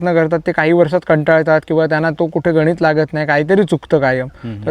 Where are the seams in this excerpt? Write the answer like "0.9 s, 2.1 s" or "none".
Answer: none